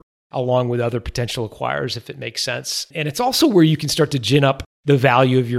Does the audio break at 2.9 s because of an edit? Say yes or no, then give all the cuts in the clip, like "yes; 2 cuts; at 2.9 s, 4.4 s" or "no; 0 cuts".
yes; 2 cuts; at 2.9 s, 4.7 s